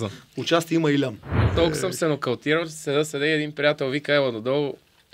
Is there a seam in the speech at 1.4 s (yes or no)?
yes